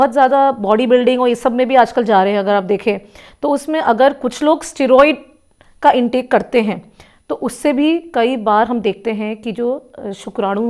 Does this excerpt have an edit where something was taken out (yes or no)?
no